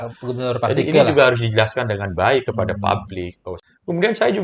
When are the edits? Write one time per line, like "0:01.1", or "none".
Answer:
0:03.5